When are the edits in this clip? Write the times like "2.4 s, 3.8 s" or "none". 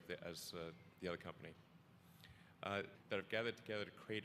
none